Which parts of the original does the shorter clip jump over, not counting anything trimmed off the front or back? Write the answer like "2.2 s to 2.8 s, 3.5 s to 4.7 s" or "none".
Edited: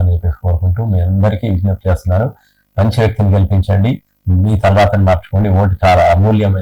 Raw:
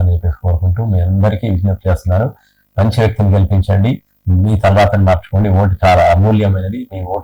none